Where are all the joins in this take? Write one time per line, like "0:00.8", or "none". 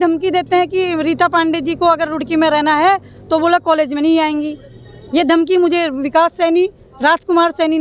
none

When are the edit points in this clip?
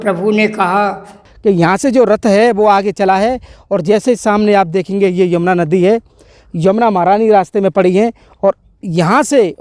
0:01.3

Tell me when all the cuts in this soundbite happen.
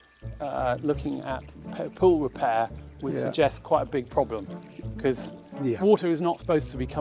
none

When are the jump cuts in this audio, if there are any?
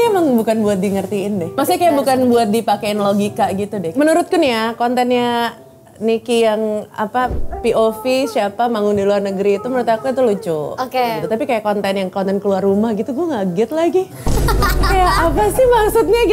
0:01.5
0:03.8
0:11.2

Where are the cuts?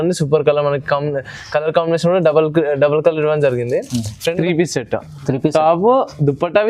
0:04.3

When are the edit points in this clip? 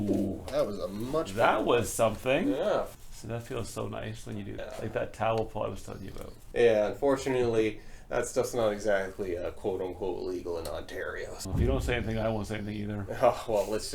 0:02.9
0:04.6
0:06.4
0:11.4

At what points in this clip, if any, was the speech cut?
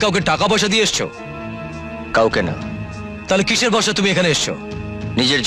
none

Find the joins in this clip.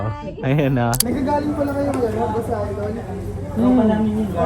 0:01.0

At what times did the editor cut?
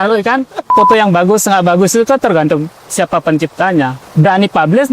0:00.7
0:04.0

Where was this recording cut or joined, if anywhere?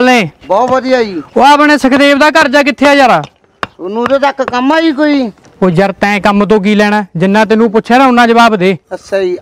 none

